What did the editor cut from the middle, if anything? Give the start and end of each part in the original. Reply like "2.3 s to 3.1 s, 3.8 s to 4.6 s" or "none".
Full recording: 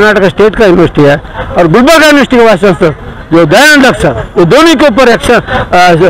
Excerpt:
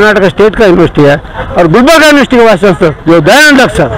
3.0 s to 3.2 s